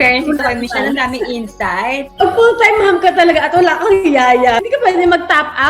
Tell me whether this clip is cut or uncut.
cut